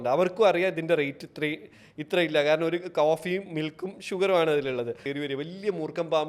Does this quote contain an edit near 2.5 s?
no; 1 cut; at 5.0 s

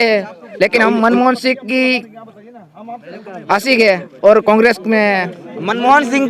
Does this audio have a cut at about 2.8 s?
no; 0 cuts

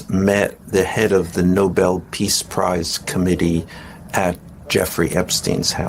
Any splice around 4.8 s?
no; 0 cuts

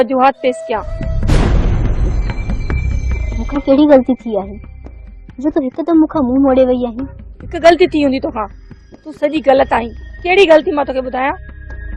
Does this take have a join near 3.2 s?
no; 0 cuts

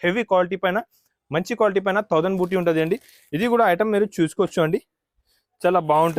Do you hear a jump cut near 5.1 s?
no; 0 cuts

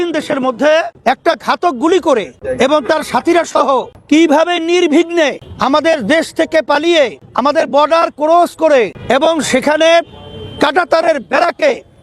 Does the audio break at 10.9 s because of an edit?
no; 6 cuts; at 0.9 s, 2.4 s, 3.9 s, 5.5 s, 7.2 s, 9.0 s

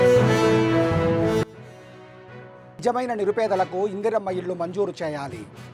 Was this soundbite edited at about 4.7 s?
no; 1 cut; at 1.3 s

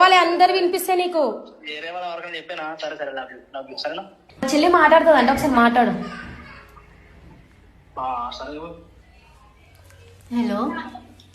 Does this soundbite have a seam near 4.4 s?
yes; 1 cut; at 4.4 s

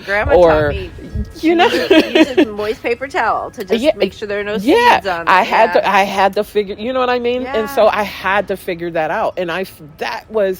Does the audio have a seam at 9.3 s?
no; 0 cuts

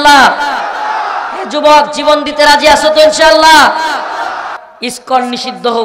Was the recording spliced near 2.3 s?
no; 1 cut; at 4.5 s

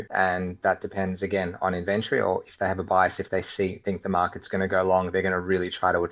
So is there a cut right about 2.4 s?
no; 0 cuts

